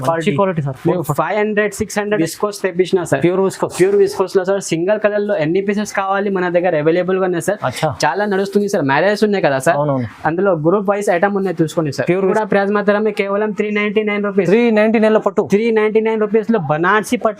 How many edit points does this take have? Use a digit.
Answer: 2